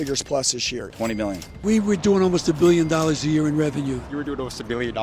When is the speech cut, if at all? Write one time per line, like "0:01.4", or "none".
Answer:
0:01.0
0:04.1